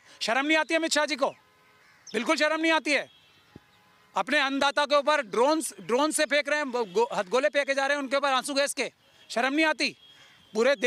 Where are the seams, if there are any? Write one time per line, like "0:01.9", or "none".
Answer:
none